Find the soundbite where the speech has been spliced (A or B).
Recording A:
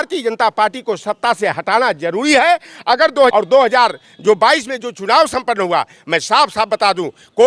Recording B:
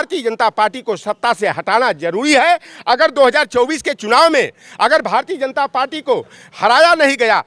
A